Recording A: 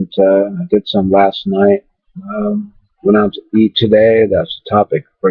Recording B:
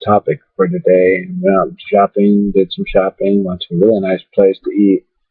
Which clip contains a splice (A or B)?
B